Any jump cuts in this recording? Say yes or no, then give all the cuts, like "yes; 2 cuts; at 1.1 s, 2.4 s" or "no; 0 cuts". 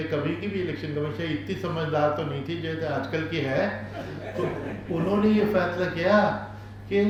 no; 0 cuts